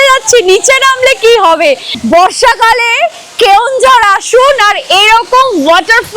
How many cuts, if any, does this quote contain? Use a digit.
1